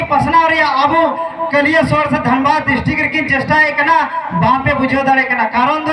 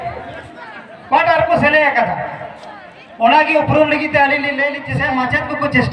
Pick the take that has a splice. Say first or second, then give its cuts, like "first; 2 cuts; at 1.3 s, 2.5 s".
second; 1 cut; at 4.9 s